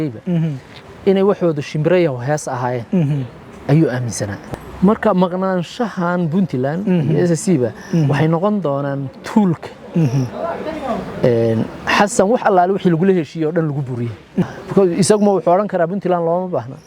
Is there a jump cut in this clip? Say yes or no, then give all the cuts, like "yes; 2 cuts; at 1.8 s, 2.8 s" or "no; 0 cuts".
yes; 2 cuts; at 4.5 s, 14.4 s